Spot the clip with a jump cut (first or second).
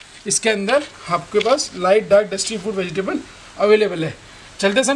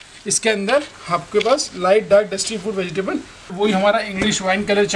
second